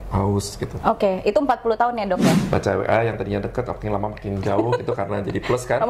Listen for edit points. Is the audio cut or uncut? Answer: cut